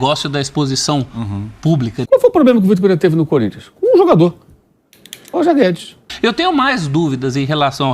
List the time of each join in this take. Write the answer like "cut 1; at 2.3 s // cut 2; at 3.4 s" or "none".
cut 1; at 2.1 s // cut 2; at 6.1 s